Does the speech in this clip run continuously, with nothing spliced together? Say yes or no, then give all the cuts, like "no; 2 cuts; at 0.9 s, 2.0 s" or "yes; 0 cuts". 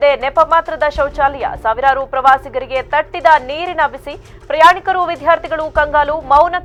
yes; 0 cuts